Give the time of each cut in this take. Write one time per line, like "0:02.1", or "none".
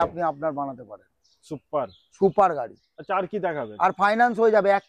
none